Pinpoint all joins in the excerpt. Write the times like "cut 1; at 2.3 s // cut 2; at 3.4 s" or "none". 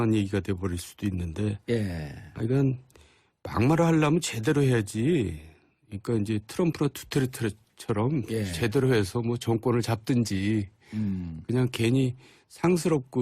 cut 1; at 10.6 s